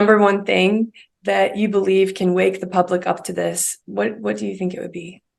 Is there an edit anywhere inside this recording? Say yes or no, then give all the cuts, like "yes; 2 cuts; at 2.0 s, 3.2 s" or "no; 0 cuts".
no; 0 cuts